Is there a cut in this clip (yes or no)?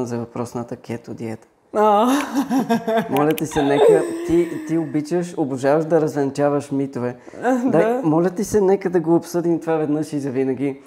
no